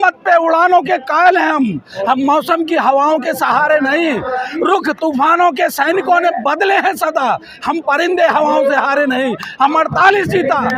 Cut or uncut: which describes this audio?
uncut